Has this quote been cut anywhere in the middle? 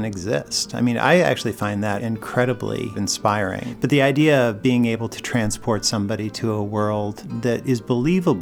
yes; 3 cuts; at 2.0 s, 3.4 s, 7.2 s

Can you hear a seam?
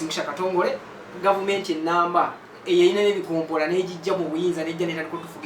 yes; 1 cut; at 1.1 s

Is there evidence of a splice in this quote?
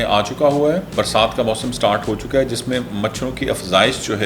yes; 1 cut; at 0.9 s

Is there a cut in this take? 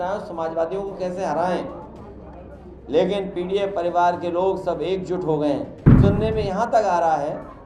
yes; 1 cut; at 5.8 s

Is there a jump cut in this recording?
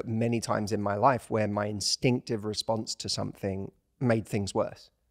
yes; 1 cut; at 3.8 s

